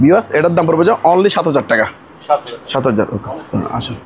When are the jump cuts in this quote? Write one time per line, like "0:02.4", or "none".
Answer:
none